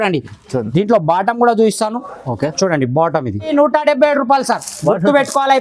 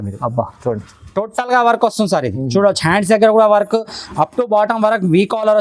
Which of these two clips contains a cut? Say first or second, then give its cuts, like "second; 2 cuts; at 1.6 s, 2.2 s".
first; 1 cut; at 3.5 s